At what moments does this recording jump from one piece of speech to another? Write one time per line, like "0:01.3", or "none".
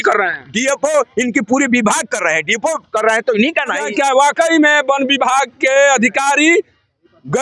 0:03.8